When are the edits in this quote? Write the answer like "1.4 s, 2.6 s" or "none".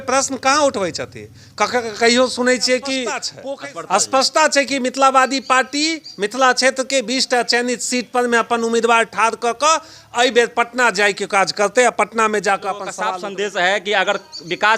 3.3 s, 13.0 s

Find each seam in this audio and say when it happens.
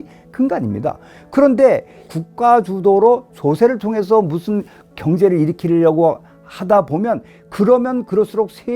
2.1 s, 5.0 s

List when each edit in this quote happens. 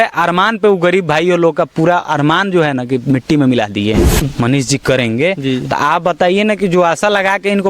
4.3 s

